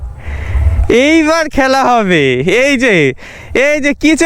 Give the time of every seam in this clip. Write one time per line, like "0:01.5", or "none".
none